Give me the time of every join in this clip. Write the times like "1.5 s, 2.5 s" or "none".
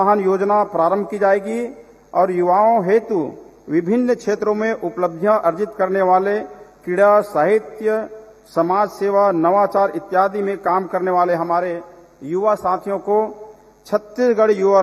none